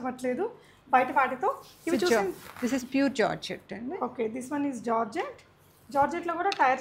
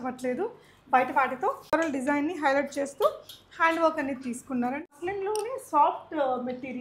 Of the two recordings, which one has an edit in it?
second; 2 cuts; at 1.7 s, 5.0 s

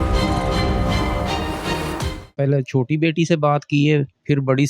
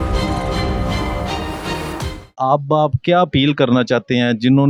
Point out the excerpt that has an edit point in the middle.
first; 1 cut; at 2.3 s

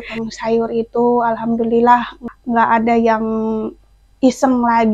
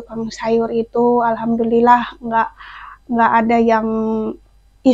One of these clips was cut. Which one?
first; 1 cut; at 2.2 s

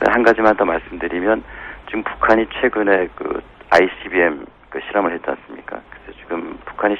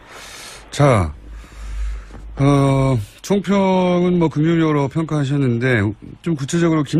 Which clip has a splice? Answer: first; 1 cut; at 4.1 s

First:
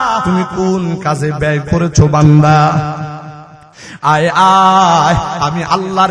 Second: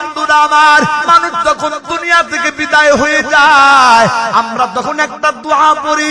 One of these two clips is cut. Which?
second; 1 cut; at 1.0 s

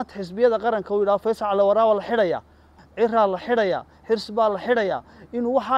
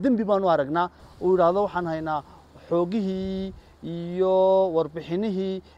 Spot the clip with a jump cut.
second; 1 cut; at 1.0 s

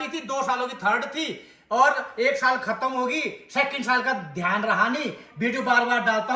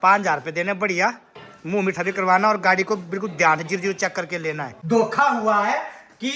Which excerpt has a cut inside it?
second; 1 cut; at 4.7 s

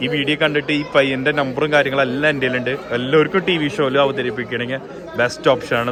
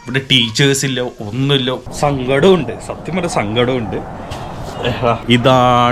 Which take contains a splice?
second; 1 cut; at 1.9 s

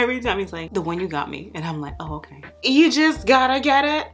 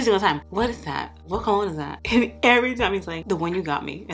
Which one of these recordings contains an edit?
first; 1 cut; at 2.5 s

